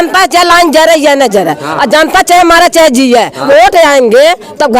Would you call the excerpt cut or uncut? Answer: cut